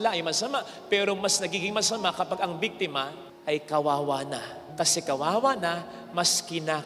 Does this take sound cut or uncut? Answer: uncut